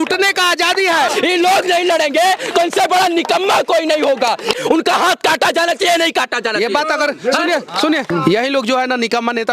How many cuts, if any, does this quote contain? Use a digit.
3